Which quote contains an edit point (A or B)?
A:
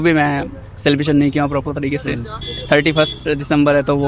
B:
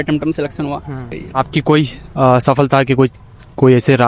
B